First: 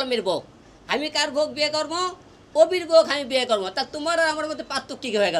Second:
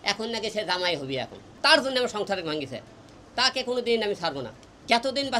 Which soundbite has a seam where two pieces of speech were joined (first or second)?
second